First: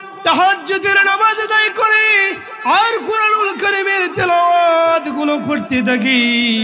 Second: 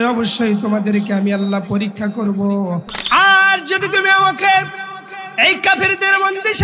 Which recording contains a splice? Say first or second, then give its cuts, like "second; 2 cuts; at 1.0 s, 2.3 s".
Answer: second; 1 cut; at 2.9 s